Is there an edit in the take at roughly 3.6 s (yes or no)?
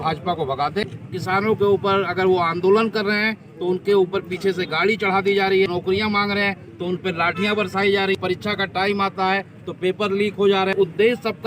no